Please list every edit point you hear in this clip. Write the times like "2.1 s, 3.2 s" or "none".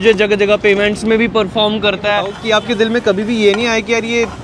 2.3 s